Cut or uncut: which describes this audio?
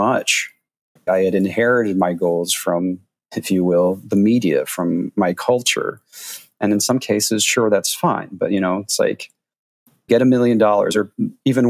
cut